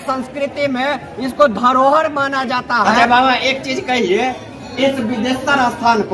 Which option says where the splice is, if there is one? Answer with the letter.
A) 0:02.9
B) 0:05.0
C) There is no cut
A